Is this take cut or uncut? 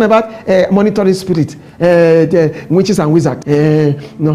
cut